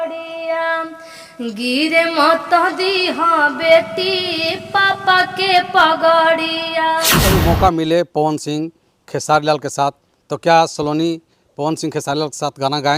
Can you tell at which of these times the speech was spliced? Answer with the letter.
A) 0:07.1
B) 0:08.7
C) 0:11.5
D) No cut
A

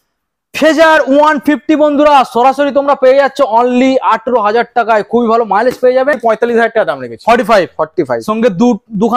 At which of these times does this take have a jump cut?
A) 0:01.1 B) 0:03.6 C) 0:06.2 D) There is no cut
C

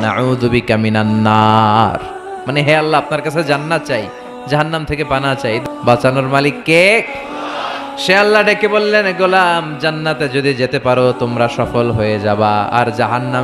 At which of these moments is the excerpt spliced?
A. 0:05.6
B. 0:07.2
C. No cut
A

